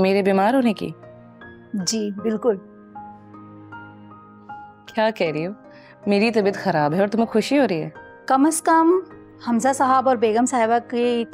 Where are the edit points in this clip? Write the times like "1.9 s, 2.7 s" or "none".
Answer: none